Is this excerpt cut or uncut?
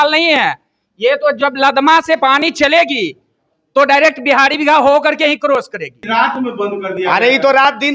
cut